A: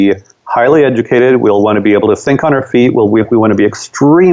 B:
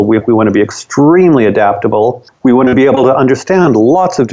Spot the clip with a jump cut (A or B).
B